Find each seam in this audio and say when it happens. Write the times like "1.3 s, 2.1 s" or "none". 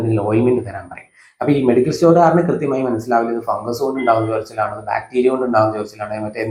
none